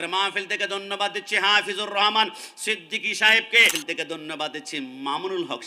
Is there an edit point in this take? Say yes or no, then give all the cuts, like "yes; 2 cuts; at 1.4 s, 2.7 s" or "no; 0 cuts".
yes; 1 cut; at 3.8 s